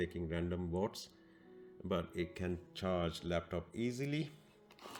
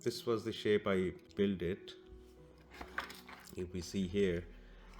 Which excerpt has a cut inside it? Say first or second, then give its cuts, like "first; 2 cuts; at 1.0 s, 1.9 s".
second; 1 cut; at 1.3 s